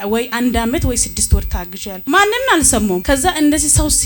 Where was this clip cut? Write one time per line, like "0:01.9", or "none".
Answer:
0:01.9
0:03.0